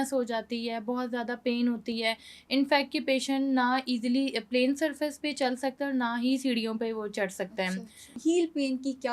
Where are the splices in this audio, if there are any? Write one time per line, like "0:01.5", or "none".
0:08.1